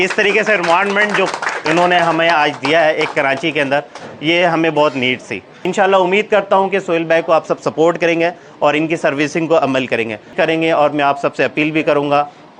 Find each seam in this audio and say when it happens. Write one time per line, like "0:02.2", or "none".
0:05.7
0:10.3

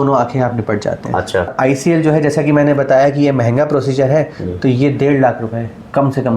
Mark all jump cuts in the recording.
0:01.5

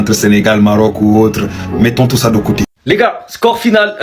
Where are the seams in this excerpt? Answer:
0:02.7

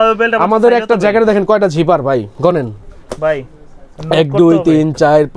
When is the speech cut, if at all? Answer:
none

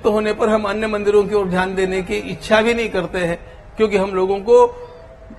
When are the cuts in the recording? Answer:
none

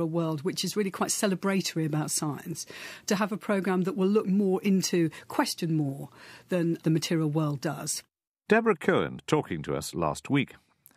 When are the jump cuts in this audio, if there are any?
none

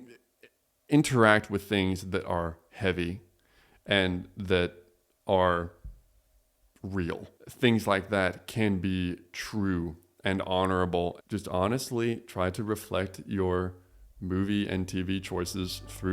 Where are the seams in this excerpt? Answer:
0:07.4
0:11.2

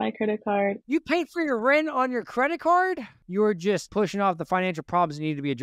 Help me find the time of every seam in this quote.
0:00.9
0:03.5

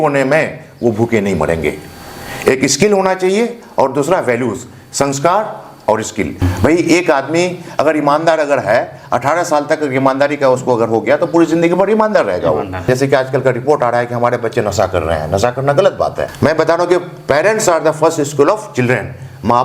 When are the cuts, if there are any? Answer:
0:06.4
0:12.9
0:16.2

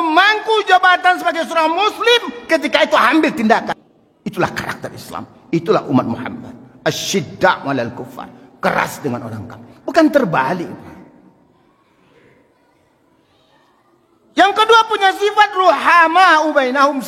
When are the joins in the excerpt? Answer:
0:03.7

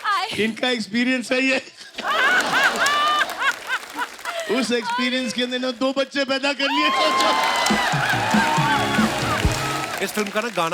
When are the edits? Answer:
0:09.8

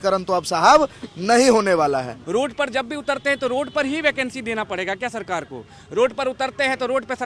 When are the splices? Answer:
0:02.2

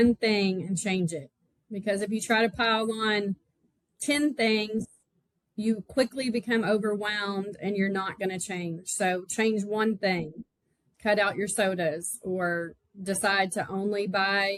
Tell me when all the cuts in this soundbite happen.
none

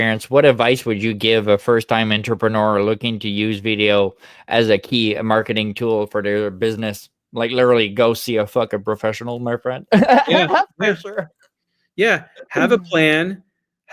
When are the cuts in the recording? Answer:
none

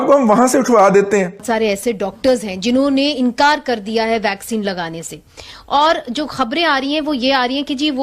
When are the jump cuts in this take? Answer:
0:01.4

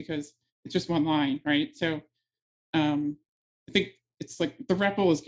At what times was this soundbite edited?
none

